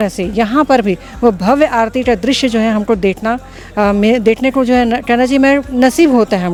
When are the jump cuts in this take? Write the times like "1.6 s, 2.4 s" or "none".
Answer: none